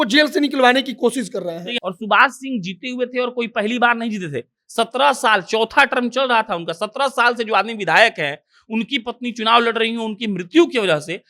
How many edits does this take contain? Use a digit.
1